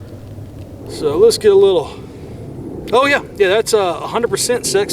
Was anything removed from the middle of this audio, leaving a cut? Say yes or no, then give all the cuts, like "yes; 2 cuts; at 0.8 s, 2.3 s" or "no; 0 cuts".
yes; 1 cut; at 0.9 s